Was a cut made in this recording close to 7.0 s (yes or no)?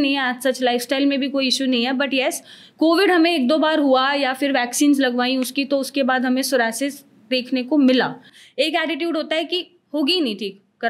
no